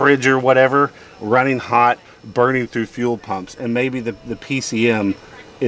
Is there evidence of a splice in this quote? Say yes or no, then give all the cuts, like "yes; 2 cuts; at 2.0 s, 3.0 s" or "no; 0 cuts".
no; 0 cuts